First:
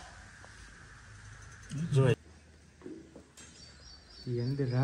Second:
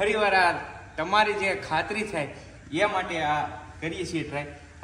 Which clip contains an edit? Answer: first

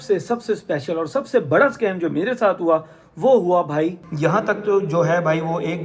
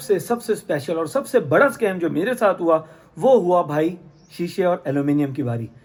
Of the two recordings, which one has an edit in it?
first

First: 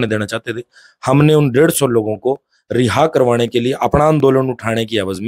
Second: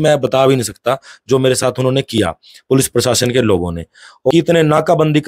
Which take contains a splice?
second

